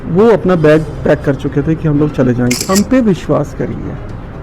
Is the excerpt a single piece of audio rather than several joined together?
no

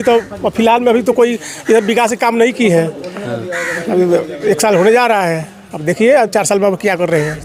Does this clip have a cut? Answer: no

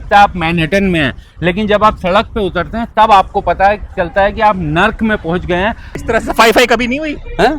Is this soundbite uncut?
no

